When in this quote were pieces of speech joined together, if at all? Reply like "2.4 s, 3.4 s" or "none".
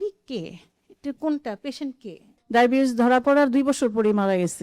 2.4 s